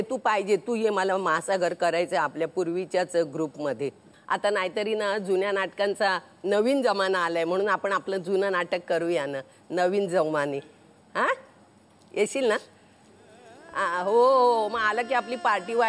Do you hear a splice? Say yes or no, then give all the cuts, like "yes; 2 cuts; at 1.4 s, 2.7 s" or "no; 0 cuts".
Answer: yes; 1 cut; at 4.1 s